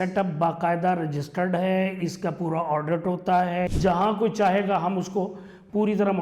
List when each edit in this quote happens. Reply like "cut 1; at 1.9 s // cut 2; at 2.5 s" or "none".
cut 1; at 3.7 s